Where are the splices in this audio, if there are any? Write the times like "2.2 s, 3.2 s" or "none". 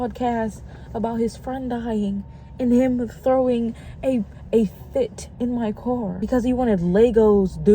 6.2 s